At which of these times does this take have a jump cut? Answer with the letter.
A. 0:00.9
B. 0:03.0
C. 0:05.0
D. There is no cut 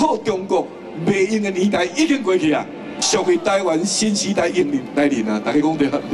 B